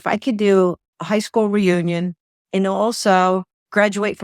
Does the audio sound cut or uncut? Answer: uncut